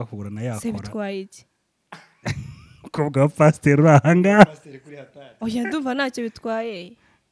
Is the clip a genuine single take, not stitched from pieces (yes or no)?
yes